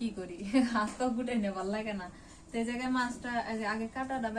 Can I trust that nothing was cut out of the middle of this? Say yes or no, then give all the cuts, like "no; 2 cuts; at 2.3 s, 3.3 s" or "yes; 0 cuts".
yes; 0 cuts